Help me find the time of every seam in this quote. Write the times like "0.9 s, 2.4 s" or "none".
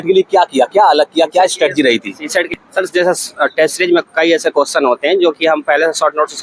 2.5 s